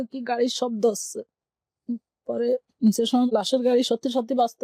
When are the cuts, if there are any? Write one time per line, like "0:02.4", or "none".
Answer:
0:03.3

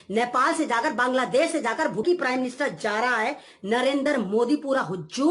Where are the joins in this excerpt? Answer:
0:02.0

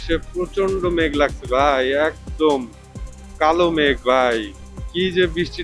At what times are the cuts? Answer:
none

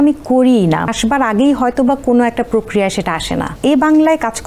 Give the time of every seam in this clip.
0:00.9
0:03.5

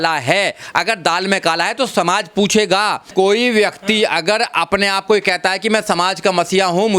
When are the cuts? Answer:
0:03.0

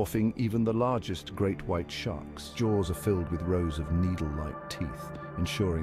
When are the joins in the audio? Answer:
0:02.5

